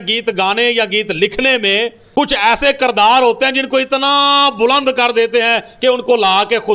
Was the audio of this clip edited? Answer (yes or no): no